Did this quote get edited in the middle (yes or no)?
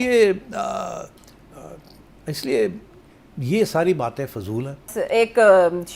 yes